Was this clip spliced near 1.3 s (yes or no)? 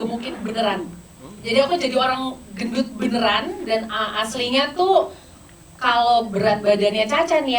no